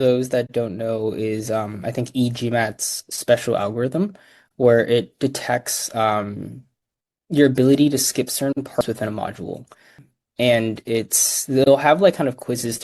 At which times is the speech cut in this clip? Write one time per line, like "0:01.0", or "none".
0:08.8

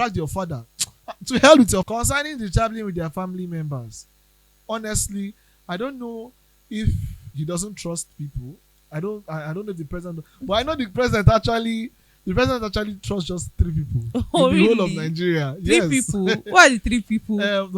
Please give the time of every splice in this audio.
0:01.8

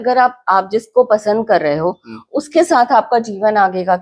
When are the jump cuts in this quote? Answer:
none

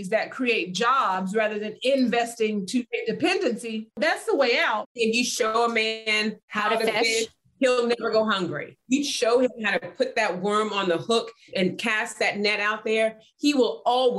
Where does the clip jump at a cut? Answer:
0:04.0
0:05.0
0:08.7

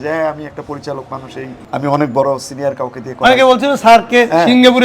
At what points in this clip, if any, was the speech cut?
0:01.6

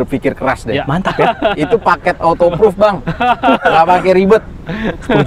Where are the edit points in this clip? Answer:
none

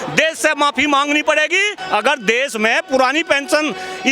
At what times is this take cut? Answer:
0:01.8

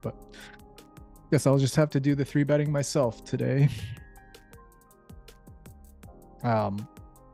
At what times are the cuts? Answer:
none

